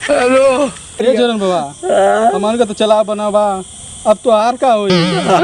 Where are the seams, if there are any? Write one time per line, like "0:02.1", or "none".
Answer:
0:01.0